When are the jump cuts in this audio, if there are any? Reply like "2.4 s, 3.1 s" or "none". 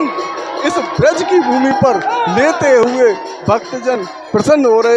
none